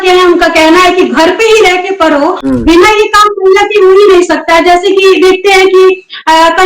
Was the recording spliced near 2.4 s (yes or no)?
yes